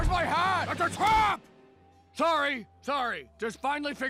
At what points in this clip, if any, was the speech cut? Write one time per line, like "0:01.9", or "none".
none